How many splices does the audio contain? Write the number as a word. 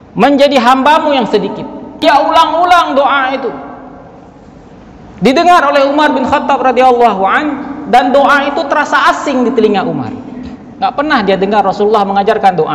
one